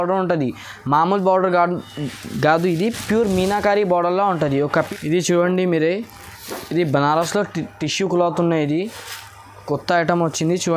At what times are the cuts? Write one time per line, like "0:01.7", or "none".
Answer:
0:04.7